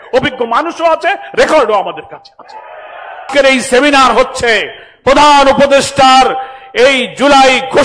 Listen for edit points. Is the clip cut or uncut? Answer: cut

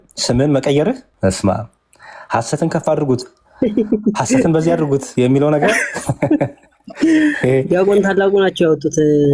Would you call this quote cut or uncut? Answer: cut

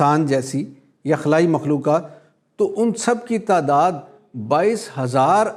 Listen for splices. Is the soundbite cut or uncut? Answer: uncut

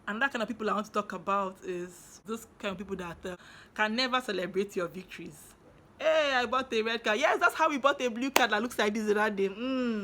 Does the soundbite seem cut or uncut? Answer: cut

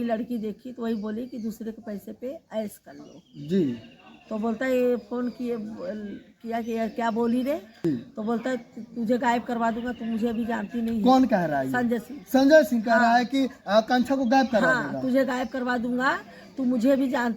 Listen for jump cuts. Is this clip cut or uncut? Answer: cut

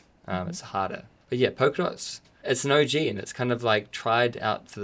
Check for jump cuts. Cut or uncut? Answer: cut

